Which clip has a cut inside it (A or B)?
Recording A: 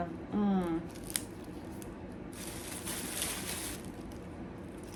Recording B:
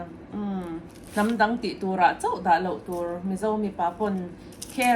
B